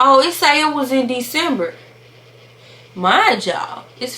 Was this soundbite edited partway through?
no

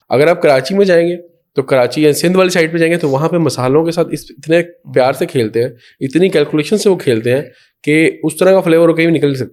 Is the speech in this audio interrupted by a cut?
no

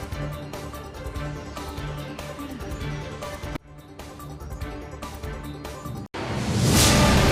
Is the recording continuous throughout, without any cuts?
yes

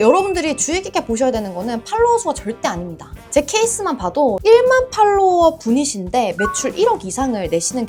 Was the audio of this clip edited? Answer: no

